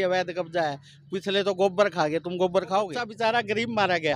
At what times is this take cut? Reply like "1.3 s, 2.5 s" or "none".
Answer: 3.0 s